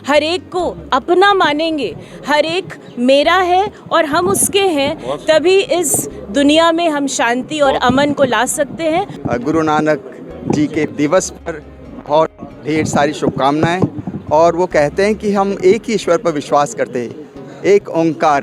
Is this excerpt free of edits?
no; 2 cuts; at 9.2 s, 10.9 s

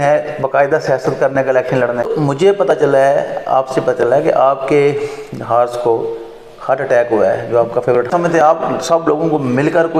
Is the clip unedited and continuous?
no; 2 cuts; at 2.0 s, 8.1 s

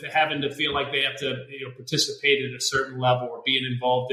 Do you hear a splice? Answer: no; 0 cuts

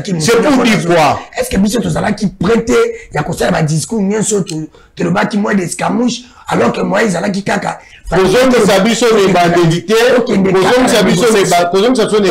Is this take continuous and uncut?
yes; 0 cuts

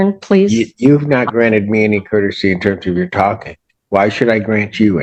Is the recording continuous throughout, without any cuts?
yes; 0 cuts

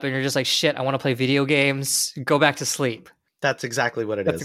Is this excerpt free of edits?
yes; 0 cuts

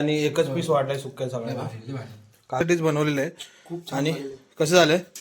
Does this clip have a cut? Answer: yes; 1 cut; at 2.6 s

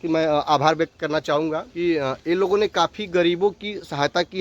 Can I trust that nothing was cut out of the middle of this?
no; 1 cut; at 1.7 s

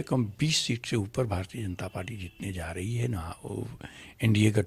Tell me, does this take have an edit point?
no; 0 cuts

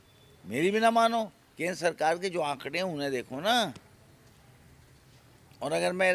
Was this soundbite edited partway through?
no; 0 cuts

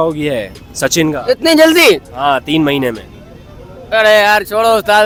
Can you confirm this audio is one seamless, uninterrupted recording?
yes; 0 cuts

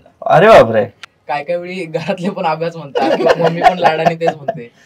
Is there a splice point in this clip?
yes; 1 cut; at 1.1 s

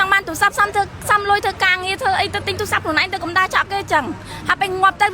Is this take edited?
no; 0 cuts

